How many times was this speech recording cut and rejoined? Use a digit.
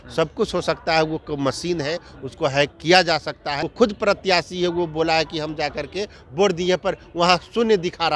1